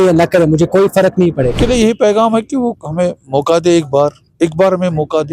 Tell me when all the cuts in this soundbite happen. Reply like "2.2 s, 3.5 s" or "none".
1.6 s